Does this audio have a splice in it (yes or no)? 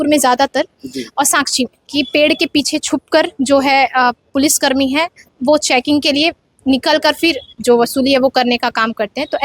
yes